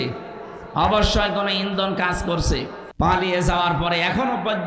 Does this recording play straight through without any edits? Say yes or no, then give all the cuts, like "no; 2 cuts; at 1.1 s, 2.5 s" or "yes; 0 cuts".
no; 1 cut; at 2.8 s